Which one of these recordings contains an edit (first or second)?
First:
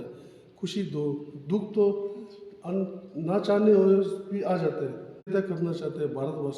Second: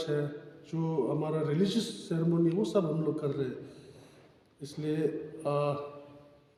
first